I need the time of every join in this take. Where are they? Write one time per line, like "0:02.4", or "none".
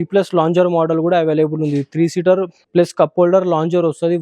0:02.6